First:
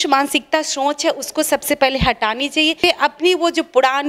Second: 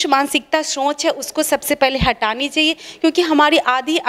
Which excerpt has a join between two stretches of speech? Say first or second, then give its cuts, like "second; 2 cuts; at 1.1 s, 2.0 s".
first; 1 cut; at 2.8 s